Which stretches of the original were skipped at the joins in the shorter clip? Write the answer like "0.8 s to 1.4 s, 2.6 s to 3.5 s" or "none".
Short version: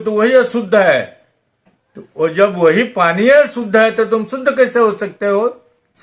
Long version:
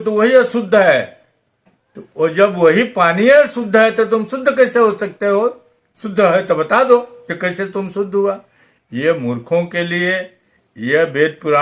none